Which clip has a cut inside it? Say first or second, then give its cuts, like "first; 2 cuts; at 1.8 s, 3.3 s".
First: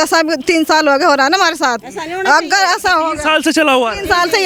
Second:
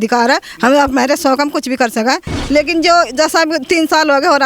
second; 1 cut; at 2.3 s